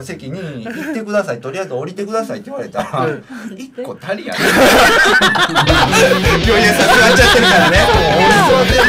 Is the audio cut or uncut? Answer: uncut